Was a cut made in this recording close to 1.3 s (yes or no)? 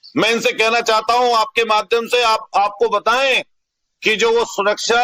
no